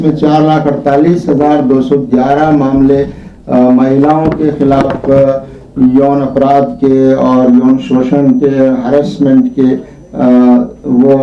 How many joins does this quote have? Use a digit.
0